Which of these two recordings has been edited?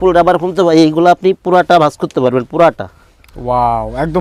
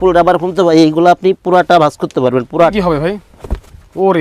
second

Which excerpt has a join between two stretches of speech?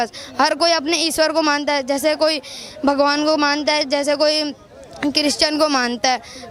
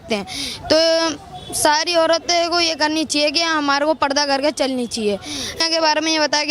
second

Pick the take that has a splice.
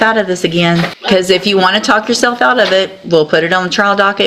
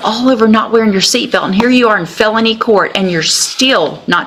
first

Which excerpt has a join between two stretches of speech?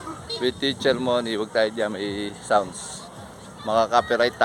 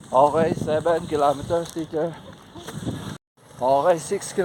second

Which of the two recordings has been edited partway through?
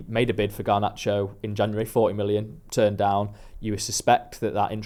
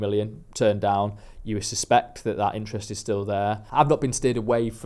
second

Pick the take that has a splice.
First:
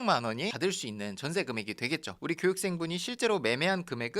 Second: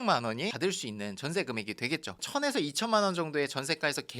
second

